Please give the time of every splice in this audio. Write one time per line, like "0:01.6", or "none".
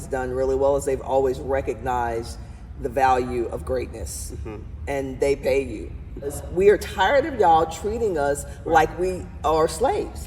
0:06.4